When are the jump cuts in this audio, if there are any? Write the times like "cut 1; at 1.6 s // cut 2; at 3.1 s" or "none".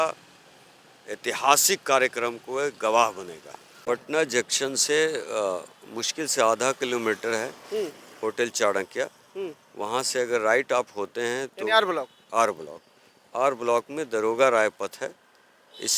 cut 1; at 3.7 s